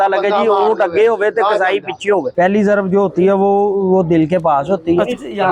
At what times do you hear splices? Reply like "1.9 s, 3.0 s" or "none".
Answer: 2.3 s